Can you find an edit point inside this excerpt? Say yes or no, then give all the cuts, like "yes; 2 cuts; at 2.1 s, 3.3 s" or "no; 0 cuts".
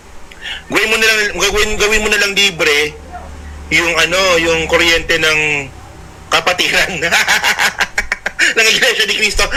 no; 0 cuts